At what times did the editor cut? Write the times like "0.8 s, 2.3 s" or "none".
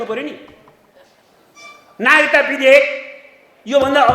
none